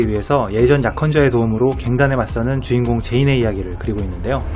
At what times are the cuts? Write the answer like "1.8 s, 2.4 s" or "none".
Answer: 2.9 s